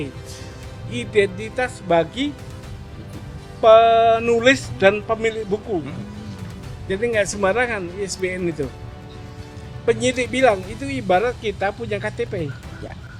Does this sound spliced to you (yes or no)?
no